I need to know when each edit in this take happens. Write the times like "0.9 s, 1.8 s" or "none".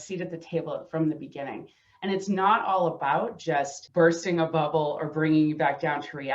3.8 s